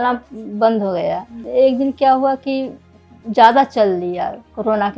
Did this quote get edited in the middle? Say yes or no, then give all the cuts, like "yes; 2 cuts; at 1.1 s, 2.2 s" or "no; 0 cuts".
yes; 1 cut; at 1.4 s